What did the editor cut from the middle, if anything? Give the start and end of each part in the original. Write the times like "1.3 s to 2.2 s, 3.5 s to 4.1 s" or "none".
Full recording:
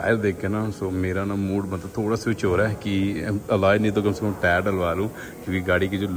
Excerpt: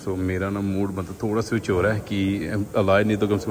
none